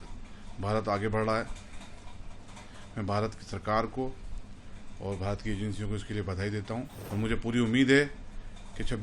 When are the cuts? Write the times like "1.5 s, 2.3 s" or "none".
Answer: 7.0 s